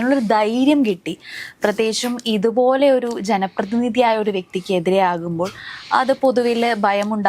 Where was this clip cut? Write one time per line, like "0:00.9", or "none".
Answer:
none